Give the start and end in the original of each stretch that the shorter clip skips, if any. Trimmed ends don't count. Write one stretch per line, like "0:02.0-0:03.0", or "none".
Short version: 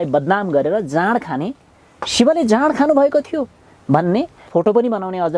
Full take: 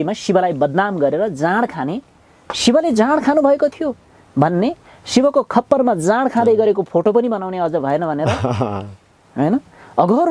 0:04.9-0:06.8